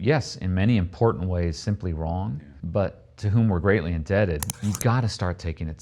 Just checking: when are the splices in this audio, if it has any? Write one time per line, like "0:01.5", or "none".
0:02.5
0:04.5